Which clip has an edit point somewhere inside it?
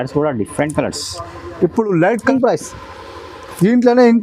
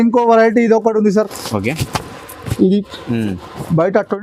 first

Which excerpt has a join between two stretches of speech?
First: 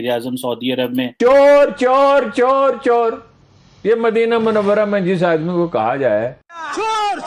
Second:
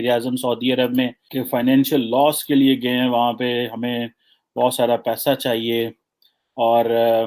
first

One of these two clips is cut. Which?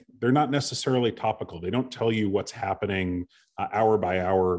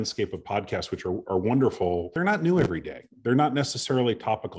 second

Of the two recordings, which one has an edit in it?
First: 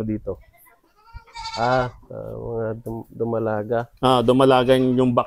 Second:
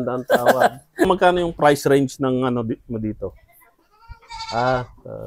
second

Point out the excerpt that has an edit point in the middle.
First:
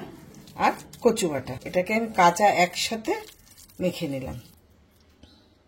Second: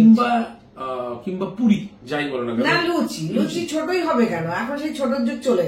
first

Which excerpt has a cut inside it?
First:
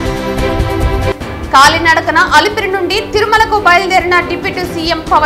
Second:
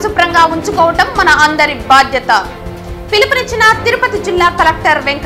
first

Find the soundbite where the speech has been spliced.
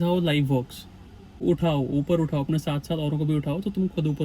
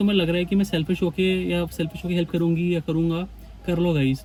first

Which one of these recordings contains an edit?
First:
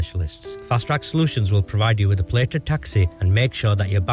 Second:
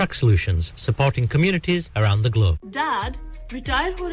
second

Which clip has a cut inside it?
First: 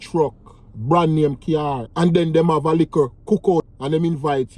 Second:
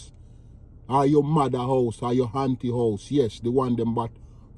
first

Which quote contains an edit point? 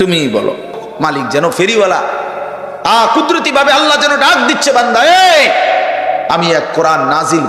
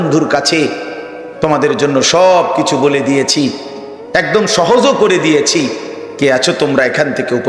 first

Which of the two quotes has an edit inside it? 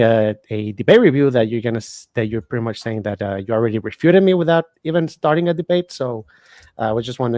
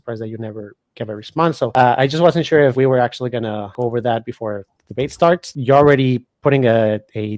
second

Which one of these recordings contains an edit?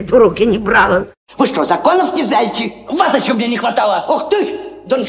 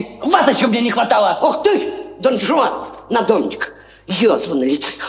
first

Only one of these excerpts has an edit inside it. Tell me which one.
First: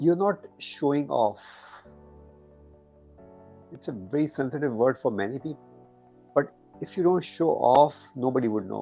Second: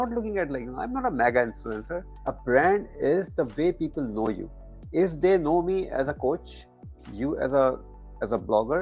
second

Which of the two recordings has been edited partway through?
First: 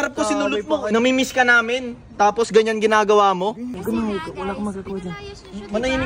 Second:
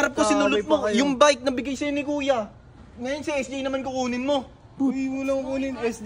first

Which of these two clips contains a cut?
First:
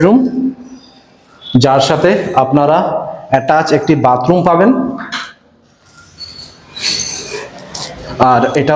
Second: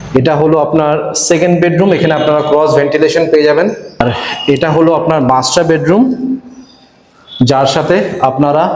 second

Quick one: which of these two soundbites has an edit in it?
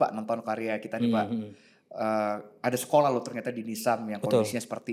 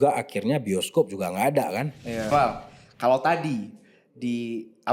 second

